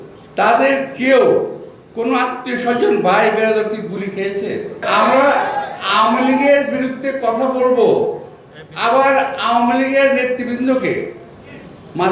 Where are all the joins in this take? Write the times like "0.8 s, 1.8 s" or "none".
4.8 s